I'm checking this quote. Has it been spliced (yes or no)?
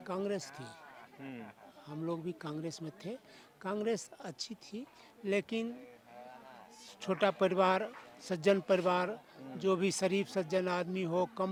no